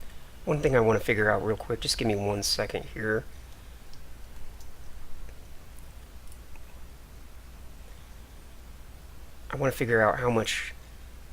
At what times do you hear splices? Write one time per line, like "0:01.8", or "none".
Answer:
0:08.0